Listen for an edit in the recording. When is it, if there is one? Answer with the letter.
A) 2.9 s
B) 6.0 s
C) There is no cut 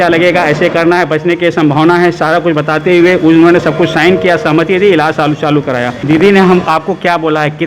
B